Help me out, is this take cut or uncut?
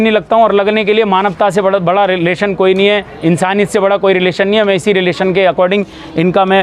uncut